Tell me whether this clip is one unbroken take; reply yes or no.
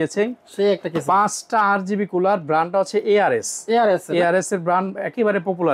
yes